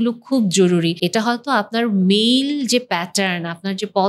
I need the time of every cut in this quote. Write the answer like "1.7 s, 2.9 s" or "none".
1.0 s